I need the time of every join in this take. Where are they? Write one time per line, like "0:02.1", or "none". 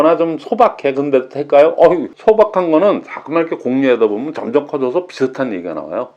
0:02.1